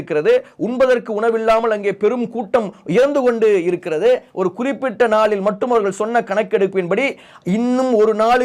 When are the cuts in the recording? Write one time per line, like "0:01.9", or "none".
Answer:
none